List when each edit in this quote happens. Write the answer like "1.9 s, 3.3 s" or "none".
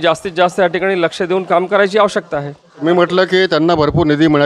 2.7 s